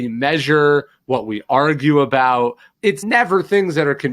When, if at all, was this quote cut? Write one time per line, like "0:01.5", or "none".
0:02.7